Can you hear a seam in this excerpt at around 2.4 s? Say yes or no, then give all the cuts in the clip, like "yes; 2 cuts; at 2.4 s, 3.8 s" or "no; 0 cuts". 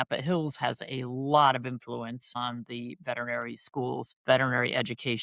yes; 2 cuts; at 2.4 s, 4.1 s